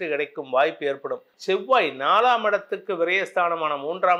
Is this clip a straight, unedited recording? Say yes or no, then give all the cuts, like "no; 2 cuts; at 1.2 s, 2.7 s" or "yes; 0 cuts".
no; 1 cut; at 1.3 s